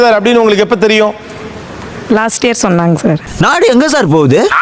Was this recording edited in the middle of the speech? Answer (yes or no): no